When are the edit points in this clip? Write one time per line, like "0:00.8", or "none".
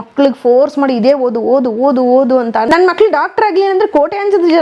0:02.7